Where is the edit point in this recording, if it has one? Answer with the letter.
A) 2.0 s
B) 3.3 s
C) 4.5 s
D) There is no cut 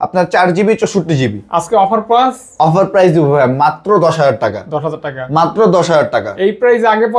D